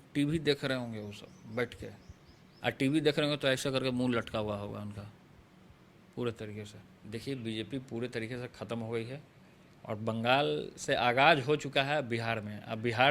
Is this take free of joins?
no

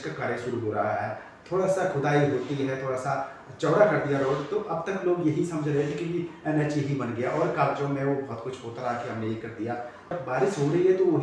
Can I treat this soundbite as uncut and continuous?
no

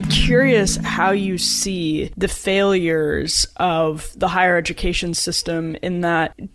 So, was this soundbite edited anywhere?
no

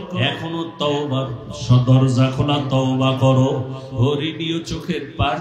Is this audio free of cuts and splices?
no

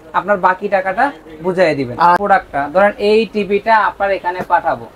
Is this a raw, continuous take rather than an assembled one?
no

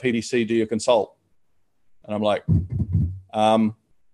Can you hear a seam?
no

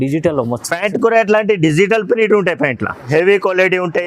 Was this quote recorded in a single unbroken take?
no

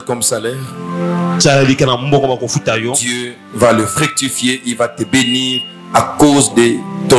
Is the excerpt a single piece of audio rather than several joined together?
yes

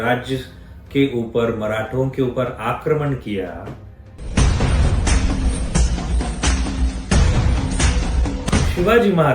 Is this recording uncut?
no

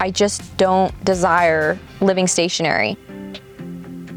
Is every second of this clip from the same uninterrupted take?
yes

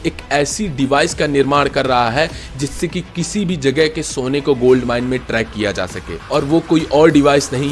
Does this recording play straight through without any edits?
yes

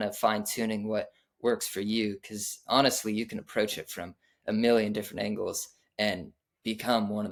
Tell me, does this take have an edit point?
no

